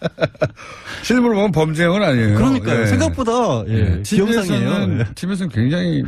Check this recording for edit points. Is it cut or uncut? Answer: uncut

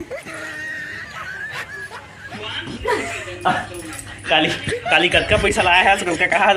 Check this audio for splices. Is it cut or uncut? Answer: cut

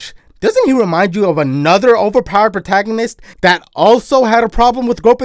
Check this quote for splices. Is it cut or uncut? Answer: uncut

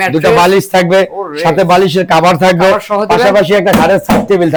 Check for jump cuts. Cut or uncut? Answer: uncut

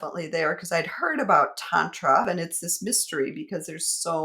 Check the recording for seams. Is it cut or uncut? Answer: cut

